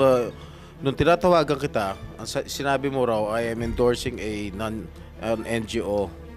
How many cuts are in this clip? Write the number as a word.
zero